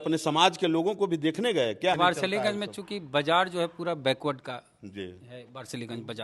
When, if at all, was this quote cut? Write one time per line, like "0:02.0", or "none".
0:02.0